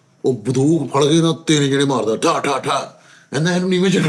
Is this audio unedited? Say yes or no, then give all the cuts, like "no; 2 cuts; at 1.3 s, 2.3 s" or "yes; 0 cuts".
yes; 0 cuts